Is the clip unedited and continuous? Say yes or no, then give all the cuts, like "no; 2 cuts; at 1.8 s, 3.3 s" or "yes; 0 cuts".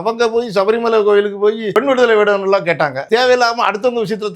no; 2 cuts; at 1.6 s, 3.0 s